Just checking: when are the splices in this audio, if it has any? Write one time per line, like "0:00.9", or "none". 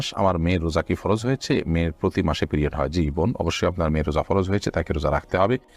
none